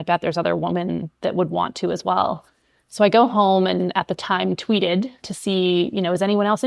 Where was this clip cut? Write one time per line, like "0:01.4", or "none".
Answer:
0:05.2